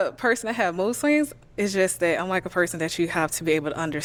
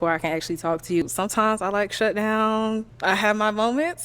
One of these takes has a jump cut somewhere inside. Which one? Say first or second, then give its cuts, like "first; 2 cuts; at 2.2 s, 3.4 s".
second; 2 cuts; at 1.0 s, 2.9 s